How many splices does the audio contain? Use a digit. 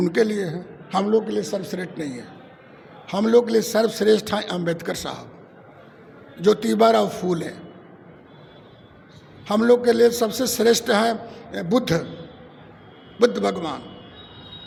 0